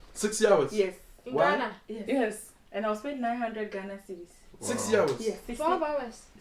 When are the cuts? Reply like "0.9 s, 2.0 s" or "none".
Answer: none